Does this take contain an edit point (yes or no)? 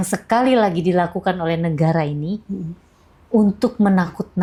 no